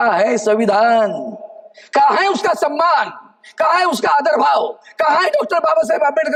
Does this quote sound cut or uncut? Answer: uncut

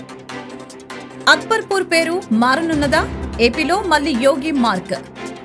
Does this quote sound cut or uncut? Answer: cut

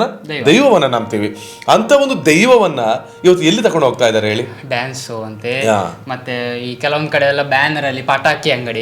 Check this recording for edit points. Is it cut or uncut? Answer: uncut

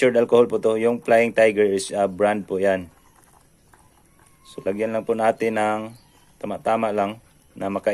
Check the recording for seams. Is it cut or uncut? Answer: uncut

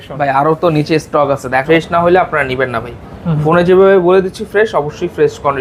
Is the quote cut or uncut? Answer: cut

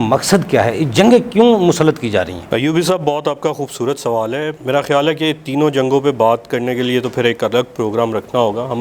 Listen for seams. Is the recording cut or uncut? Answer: uncut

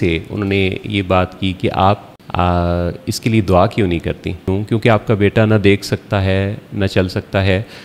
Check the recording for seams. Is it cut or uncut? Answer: cut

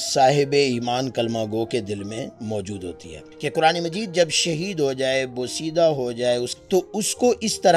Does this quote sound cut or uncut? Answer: cut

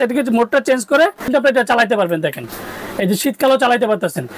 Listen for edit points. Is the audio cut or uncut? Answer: cut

